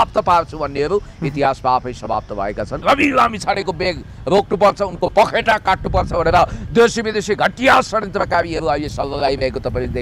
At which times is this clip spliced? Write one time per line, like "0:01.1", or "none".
0:02.8